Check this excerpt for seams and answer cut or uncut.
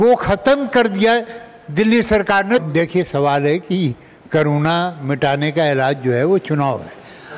cut